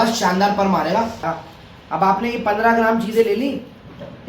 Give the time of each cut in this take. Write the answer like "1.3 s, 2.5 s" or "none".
1.3 s